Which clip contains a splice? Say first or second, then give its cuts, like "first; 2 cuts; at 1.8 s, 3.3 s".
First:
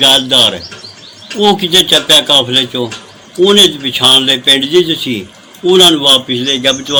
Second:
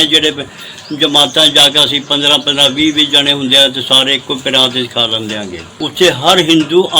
second; 1 cut; at 5.6 s